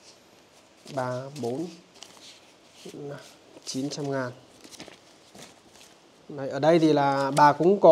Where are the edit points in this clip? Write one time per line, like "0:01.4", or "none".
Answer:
none